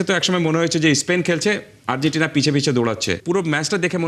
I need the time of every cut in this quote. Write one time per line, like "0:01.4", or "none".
0:03.2